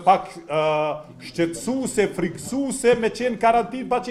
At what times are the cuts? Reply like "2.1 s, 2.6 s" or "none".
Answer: none